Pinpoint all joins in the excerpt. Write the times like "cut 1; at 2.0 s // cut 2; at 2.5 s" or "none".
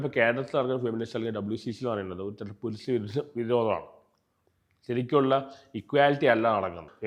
none